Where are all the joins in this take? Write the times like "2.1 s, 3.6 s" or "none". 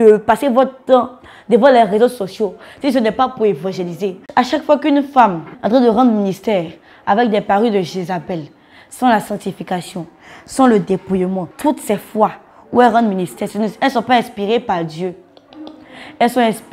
4.2 s, 5.5 s, 11.5 s